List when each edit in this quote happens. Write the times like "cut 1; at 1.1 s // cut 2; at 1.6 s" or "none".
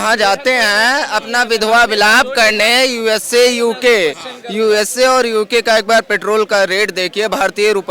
none